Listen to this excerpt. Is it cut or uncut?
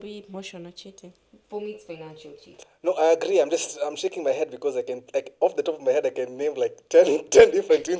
cut